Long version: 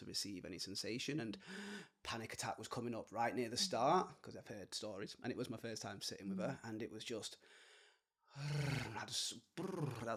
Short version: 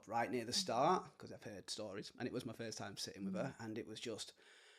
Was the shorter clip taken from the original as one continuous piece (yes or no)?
yes